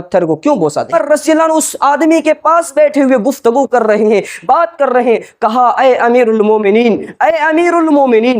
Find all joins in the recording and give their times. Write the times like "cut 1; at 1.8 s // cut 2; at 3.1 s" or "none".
cut 1; at 0.9 s